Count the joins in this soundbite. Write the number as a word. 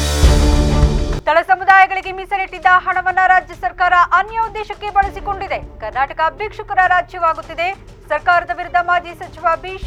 zero